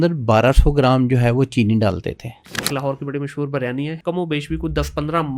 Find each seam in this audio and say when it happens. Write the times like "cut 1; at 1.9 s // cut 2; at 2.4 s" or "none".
cut 1; at 2.7 s // cut 2; at 4.0 s